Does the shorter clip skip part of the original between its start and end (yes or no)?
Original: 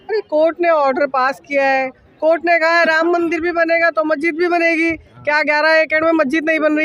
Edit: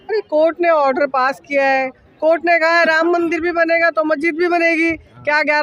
no